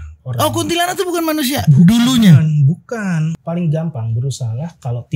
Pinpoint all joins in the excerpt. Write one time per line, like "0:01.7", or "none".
0:03.4